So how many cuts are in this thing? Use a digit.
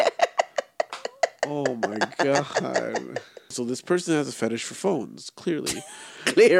1